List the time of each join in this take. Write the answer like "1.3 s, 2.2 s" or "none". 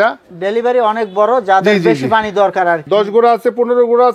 2.8 s